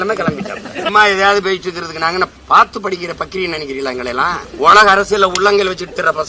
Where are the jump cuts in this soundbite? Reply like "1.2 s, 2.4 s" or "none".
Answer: 0.9 s, 2.4 s, 4.5 s